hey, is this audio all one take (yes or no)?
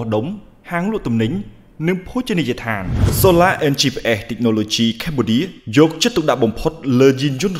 no